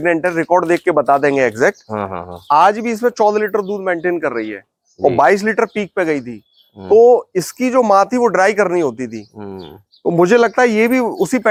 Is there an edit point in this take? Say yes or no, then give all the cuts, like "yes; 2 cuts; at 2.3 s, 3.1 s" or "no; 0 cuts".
no; 0 cuts